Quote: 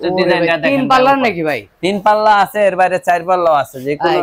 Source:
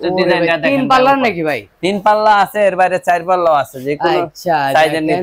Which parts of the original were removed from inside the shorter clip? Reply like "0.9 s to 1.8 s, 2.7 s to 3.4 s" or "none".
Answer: none